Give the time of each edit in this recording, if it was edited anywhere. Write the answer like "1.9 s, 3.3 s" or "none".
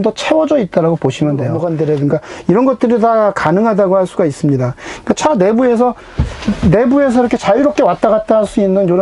1.6 s